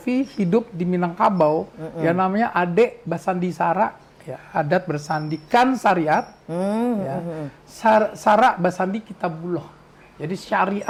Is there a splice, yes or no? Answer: no